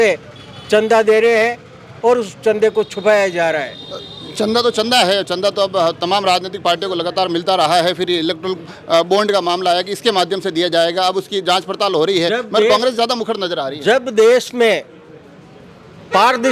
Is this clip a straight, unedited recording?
yes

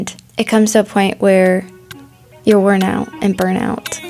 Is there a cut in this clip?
no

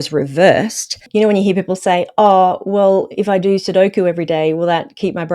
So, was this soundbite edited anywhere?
yes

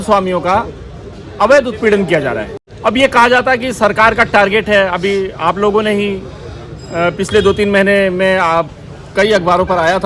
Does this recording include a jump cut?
no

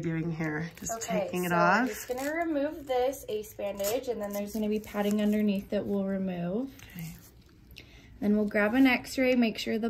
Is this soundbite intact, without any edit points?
yes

